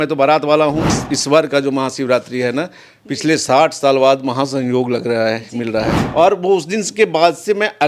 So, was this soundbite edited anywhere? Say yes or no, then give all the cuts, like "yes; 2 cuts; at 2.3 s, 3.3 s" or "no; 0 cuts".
yes; 2 cuts; at 0.9 s, 6.0 s